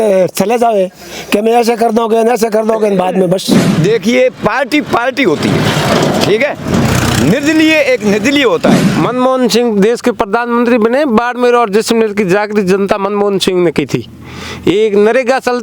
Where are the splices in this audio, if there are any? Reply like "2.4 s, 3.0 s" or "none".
3.7 s, 8.8 s